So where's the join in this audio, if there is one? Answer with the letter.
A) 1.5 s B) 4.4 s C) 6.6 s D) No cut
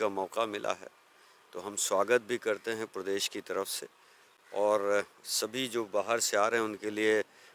D